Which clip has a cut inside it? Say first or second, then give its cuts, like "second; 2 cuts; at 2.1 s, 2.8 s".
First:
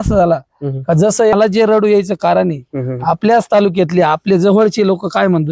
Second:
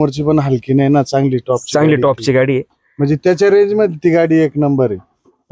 first; 1 cut; at 1.3 s